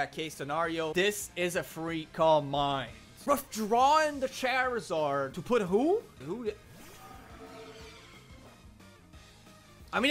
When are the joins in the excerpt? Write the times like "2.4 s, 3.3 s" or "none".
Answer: 0.9 s